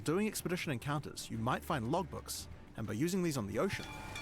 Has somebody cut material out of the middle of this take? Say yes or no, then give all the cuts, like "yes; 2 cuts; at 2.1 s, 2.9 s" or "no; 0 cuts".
yes; 1 cut; at 1.7 s